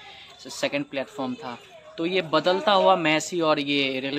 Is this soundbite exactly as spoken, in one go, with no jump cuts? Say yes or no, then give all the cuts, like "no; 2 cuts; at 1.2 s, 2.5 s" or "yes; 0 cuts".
yes; 0 cuts